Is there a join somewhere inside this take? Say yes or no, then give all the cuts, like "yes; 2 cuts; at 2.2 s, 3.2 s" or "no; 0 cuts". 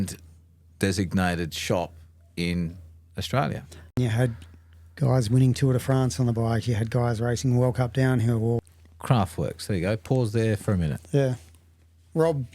yes; 2 cuts; at 3.9 s, 8.7 s